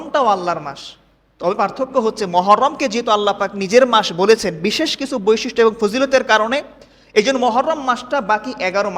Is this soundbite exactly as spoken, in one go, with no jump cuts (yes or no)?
yes